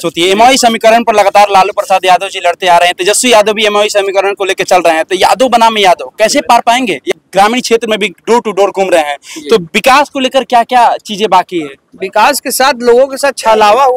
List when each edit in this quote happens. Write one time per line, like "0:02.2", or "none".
0:07.1